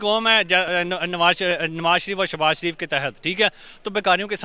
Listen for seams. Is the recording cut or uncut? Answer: uncut